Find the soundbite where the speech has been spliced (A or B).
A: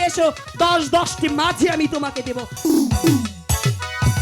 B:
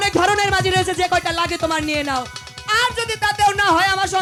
A